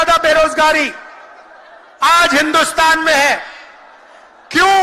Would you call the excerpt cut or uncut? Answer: uncut